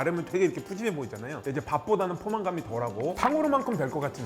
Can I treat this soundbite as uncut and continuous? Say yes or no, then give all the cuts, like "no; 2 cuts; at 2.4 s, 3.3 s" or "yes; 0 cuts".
no; 2 cuts; at 1.3 s, 3.2 s